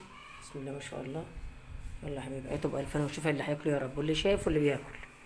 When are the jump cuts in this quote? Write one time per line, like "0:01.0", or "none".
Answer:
0:02.5